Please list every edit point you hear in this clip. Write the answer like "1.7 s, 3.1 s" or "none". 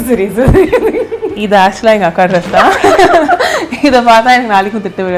none